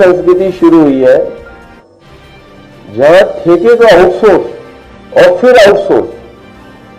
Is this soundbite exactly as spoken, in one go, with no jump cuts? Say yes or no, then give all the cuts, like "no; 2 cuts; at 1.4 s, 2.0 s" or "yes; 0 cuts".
yes; 0 cuts